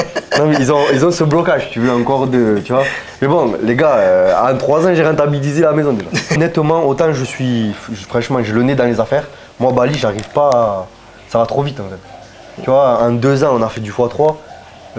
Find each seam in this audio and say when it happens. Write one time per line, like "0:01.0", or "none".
0:06.3

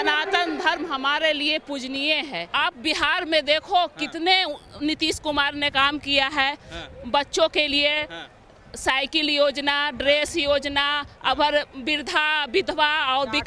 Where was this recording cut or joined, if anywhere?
0:02.4

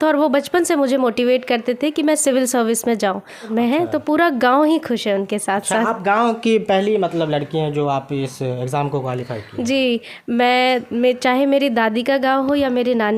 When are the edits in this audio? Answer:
0:03.5

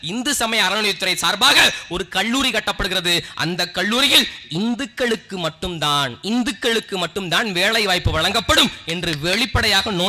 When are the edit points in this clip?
none

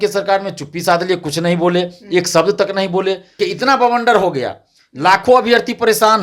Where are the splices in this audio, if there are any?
0:03.4

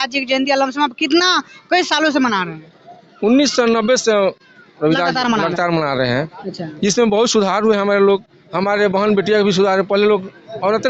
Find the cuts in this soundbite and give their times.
none

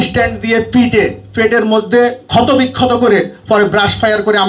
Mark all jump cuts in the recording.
0:02.2

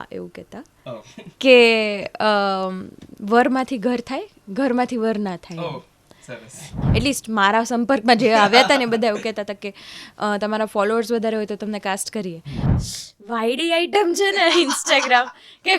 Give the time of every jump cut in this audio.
0:06.7
0:12.6

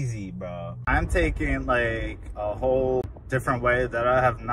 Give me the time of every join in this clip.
0:00.8
0:03.0

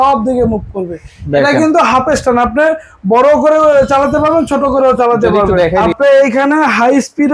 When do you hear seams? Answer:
0:05.7

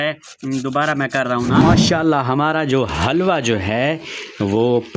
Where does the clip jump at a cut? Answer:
0:01.6

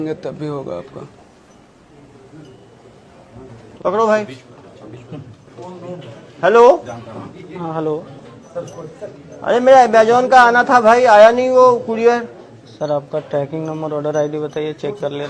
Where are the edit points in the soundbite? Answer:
0:03.6

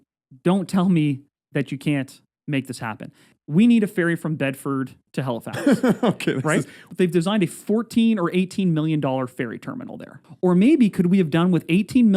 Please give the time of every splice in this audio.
0:03.3
0:05.0
0:06.8
0:10.2

